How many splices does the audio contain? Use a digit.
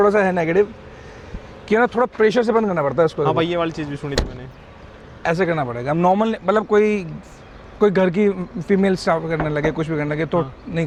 0